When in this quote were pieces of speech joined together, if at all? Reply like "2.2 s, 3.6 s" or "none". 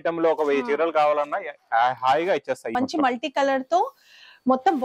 2.7 s